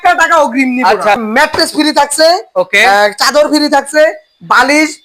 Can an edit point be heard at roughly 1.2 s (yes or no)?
yes